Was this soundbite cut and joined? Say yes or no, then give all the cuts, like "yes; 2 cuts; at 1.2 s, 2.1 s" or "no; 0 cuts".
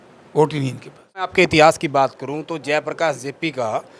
yes; 1 cut; at 1.3 s